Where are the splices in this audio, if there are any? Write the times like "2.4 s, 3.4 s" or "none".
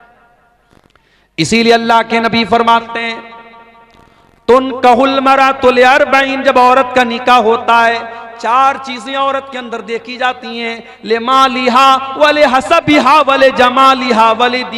0.9 s